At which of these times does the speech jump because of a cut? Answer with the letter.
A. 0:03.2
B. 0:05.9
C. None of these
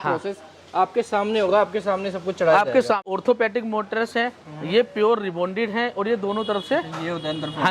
A